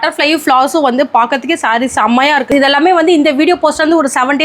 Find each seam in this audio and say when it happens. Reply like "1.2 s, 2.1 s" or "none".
2.5 s